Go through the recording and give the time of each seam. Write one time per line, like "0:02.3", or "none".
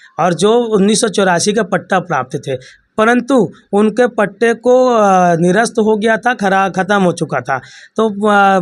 none